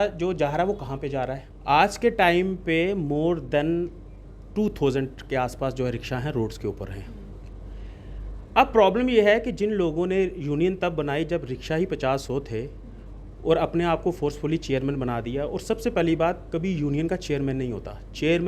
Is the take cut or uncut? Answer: cut